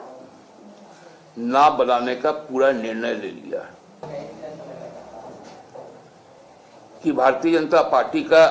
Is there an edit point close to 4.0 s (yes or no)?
yes